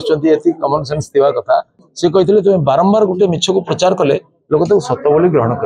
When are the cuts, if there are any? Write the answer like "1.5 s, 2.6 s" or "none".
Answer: 1.8 s